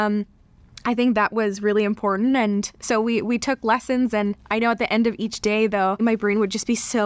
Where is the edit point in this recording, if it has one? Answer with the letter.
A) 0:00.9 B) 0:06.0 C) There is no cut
B